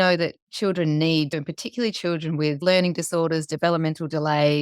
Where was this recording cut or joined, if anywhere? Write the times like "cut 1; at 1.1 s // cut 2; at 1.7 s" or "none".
cut 1; at 1.3 s // cut 2; at 2.6 s

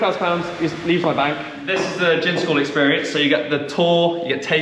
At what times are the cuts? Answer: cut 1; at 1.5 s

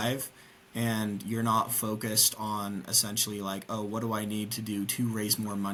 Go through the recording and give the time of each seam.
none

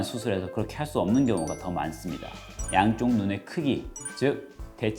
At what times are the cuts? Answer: cut 1; at 2.6 s

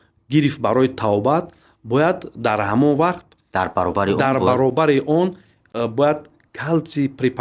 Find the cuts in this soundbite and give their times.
none

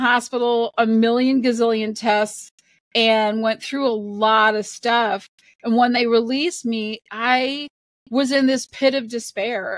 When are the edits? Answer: none

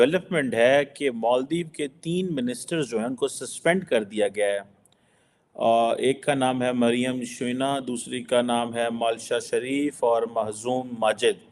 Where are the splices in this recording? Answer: none

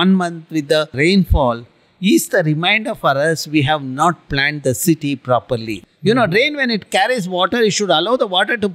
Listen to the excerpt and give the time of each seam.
cut 1; at 0.9 s // cut 2; at 5.8 s

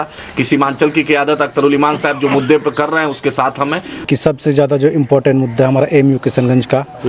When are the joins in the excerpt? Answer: cut 1; at 4.1 s

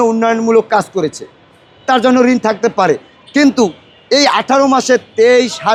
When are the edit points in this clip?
none

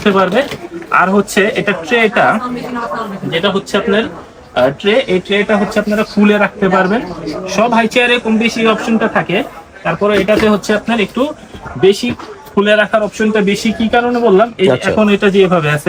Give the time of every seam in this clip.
none

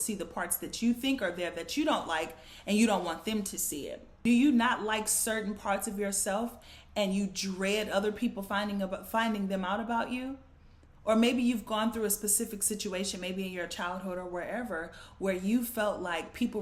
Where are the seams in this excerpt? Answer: cut 1; at 4.0 s

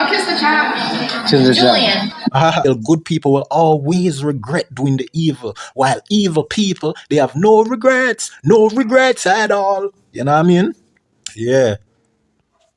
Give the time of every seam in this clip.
cut 1; at 2.6 s

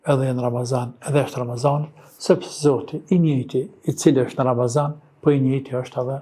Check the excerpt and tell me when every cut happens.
none

